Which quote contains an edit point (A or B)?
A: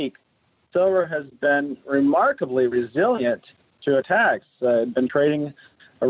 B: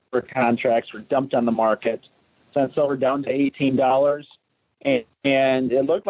A